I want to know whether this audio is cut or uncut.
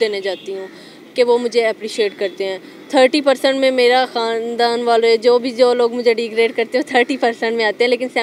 uncut